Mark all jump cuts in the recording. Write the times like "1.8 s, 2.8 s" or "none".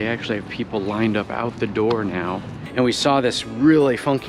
2.5 s

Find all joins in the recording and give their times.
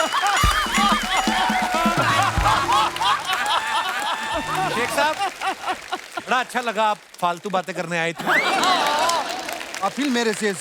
4.8 s

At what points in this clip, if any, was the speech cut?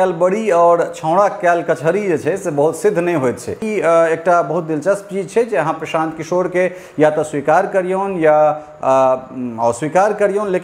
3.6 s

